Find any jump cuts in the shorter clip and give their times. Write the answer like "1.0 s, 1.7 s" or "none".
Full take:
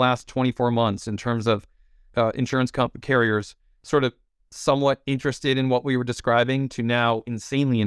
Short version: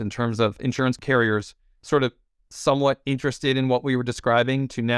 1.0 s